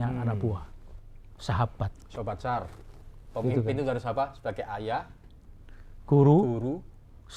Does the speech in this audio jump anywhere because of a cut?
no; 0 cuts

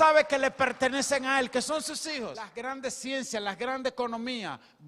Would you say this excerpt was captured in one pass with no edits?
no; 1 cut; at 2.5 s

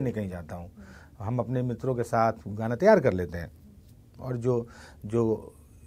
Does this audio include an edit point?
no; 0 cuts

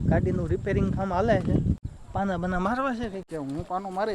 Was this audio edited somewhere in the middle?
yes; 2 cuts; at 1.9 s, 3.2 s

